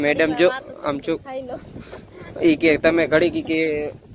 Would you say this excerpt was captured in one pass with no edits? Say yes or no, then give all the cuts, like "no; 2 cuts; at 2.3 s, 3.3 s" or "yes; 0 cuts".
yes; 0 cuts